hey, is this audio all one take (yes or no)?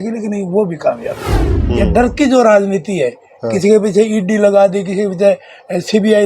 no